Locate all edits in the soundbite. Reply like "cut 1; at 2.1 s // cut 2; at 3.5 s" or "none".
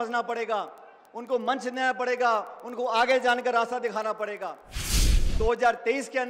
cut 1; at 5.0 s

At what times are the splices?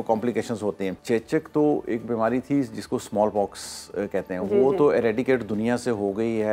cut 1; at 1.0 s

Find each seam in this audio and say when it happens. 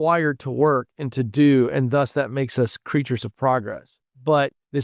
none

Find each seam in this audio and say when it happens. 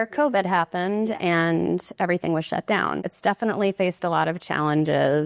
cut 1; at 3.0 s

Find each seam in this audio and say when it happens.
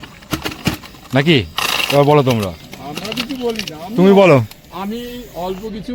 none

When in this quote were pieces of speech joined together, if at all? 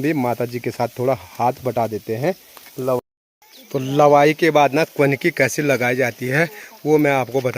cut 1; at 3.0 s

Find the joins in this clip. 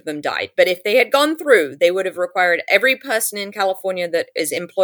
none

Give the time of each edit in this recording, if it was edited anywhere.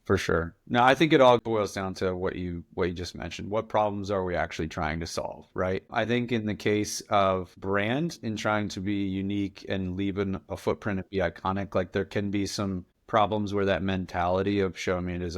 cut 1; at 1.4 s

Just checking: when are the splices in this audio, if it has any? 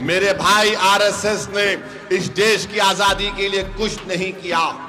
none

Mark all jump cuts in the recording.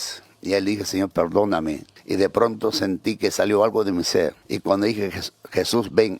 cut 1; at 1.9 s // cut 2; at 4.4 s

